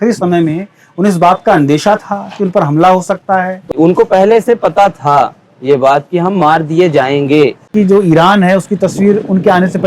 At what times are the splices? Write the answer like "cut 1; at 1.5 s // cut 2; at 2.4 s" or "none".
cut 1; at 3.7 s // cut 2; at 7.7 s